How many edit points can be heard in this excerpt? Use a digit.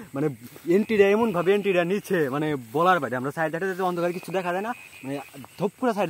0